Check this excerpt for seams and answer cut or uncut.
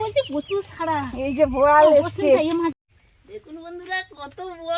cut